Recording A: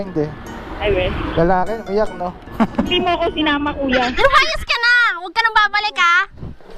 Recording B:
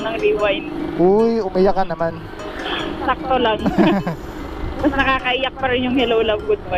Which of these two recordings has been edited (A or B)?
A